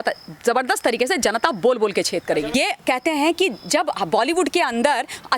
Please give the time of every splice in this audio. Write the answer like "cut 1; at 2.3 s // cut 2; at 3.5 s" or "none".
cut 1; at 2.5 s